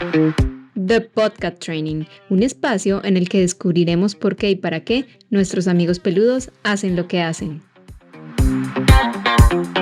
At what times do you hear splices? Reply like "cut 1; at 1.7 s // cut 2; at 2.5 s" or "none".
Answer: none